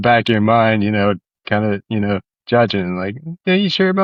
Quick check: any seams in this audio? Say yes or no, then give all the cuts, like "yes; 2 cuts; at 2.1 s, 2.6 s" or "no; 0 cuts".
no; 0 cuts